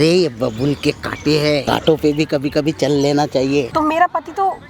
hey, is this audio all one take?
no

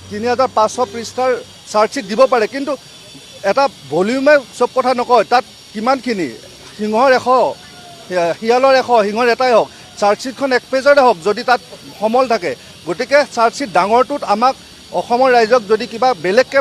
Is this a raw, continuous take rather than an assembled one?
yes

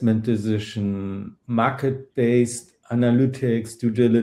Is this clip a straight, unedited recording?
no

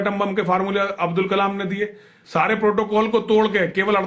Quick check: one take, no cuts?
yes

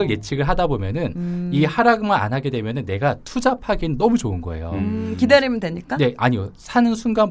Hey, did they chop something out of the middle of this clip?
no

